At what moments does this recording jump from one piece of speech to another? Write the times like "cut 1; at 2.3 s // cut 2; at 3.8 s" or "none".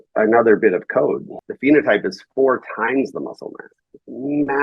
cut 1; at 1.3 s